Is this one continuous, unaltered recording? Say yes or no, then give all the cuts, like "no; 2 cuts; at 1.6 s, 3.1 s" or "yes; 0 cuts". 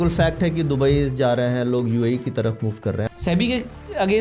no; 1 cut; at 3.0 s